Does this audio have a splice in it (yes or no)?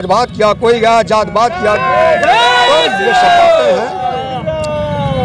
no